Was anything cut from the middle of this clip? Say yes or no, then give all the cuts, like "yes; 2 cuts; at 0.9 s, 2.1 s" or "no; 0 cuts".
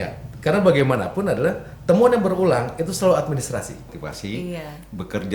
yes; 1 cut; at 3.9 s